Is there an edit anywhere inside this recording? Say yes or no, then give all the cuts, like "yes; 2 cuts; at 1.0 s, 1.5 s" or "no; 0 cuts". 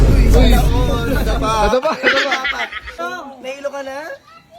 yes; 1 cut; at 3.0 s